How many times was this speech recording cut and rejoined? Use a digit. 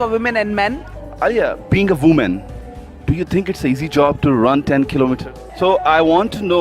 2